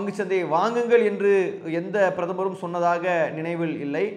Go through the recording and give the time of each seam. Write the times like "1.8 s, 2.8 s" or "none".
none